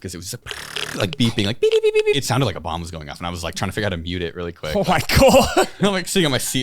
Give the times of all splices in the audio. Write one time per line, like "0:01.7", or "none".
0:02.2